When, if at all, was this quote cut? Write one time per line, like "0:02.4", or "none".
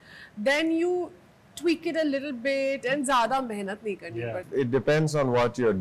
0:04.4